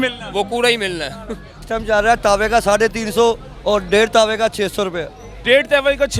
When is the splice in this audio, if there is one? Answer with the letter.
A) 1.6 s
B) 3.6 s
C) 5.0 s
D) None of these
A